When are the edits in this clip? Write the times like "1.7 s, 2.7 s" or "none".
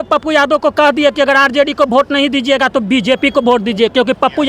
none